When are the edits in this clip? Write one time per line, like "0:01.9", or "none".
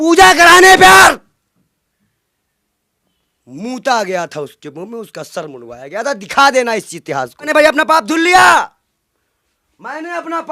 0:07.5